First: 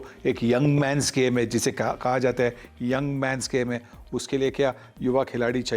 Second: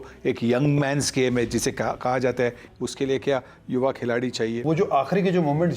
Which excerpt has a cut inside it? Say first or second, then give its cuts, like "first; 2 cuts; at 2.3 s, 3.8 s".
second; 2 cuts; at 2.7 s, 4.6 s